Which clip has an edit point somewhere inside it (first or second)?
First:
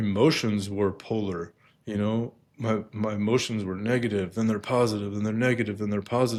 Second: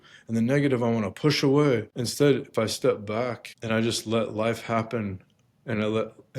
second